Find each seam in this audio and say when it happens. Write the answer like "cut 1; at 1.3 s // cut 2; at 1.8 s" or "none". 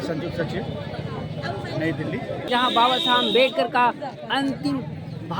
cut 1; at 2.4 s